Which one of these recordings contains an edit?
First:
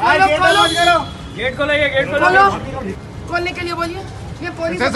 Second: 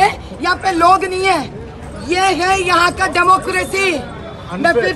first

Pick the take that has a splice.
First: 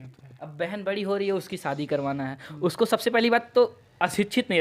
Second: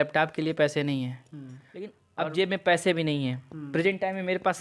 second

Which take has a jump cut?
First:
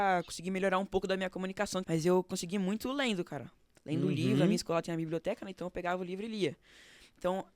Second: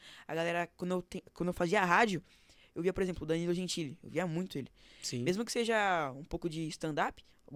first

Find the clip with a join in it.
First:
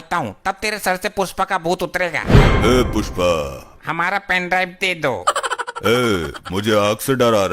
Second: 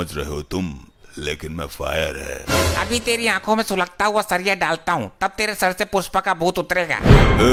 first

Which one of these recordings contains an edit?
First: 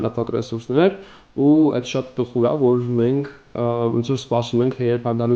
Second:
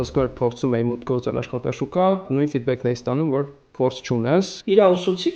second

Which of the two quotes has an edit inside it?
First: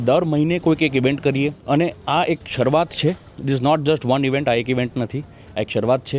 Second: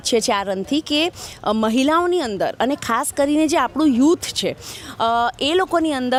first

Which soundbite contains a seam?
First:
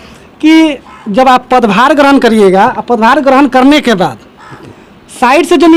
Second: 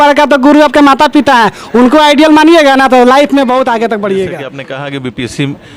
second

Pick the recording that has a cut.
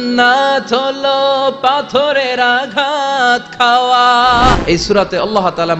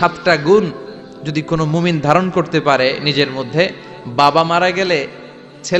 first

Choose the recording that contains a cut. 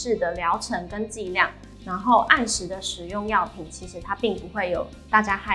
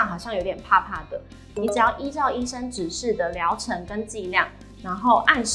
second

